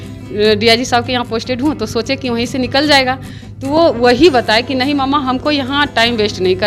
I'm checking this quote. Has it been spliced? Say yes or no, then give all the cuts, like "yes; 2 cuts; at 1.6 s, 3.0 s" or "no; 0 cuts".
no; 0 cuts